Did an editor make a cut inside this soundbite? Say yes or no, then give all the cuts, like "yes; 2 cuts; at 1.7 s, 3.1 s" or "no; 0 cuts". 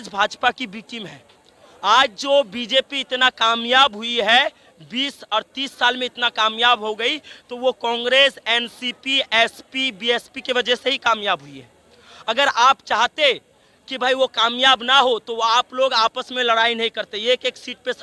no; 0 cuts